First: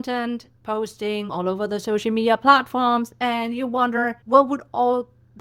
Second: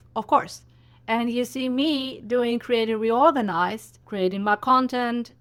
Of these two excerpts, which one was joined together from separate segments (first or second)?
first